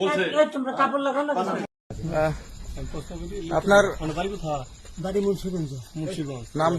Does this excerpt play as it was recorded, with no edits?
no; 1 cut; at 1.8 s

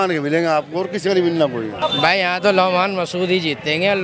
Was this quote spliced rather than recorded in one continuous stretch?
yes; 1 cut; at 1.8 s

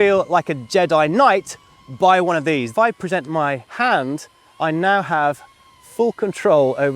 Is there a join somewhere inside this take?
yes; 2 cuts; at 2.7 s, 3.7 s

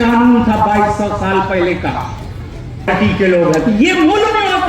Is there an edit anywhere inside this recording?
yes; 1 cut; at 2.9 s

